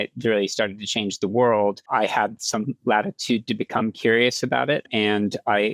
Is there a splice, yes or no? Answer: yes